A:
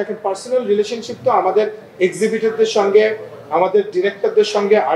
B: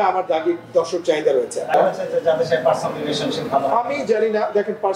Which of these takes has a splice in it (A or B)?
B